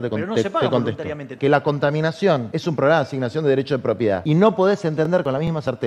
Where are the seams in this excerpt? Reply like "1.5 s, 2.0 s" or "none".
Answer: 1.3 s, 2.5 s, 4.2 s